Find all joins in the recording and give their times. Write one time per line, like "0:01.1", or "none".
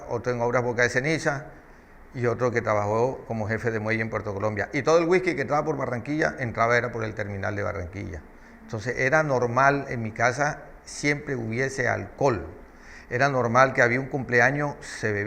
0:04.6